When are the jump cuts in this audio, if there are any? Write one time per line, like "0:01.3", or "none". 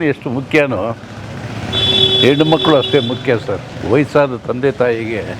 none